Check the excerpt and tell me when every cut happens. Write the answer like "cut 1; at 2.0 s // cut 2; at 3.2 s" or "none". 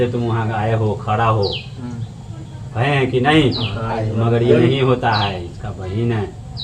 none